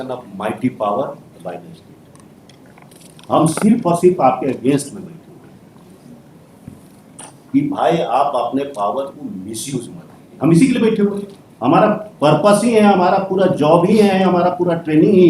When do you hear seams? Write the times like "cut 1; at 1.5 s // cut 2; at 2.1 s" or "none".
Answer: cut 1; at 14.1 s